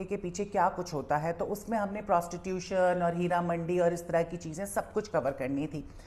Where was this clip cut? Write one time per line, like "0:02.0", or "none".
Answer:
none